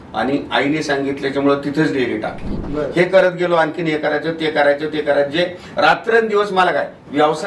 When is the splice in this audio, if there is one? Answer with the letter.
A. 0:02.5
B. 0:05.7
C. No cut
A